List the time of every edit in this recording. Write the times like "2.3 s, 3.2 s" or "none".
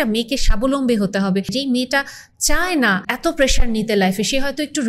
1.5 s, 3.1 s